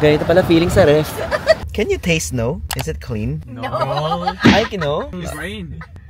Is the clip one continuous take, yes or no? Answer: no